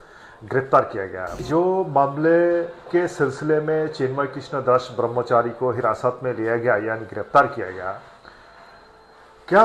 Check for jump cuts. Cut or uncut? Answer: cut